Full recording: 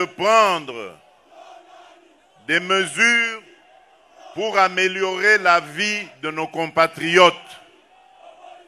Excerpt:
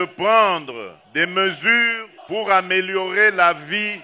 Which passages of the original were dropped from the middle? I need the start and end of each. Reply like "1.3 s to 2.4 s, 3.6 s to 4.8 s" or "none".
1.0 s to 2.3 s, 3.4 s to 4.1 s